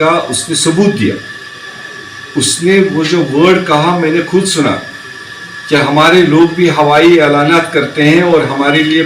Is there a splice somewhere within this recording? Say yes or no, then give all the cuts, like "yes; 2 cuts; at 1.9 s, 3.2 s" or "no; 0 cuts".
no; 0 cuts